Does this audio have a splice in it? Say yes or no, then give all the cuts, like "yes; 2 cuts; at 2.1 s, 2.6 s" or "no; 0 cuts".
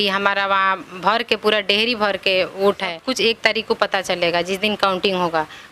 yes; 1 cut; at 3.0 s